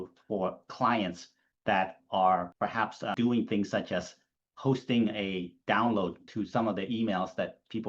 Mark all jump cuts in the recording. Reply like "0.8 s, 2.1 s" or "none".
2.6 s, 6.2 s